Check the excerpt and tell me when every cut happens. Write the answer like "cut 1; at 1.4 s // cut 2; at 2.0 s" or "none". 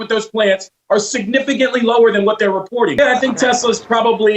cut 1; at 3.0 s